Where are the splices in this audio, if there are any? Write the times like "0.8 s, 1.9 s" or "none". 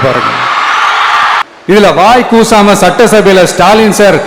1.5 s